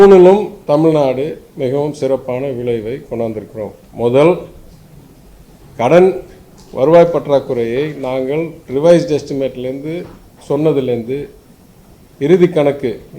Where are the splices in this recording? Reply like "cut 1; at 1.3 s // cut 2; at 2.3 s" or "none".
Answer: none